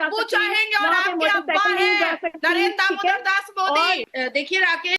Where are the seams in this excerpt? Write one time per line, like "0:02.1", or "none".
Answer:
0:04.0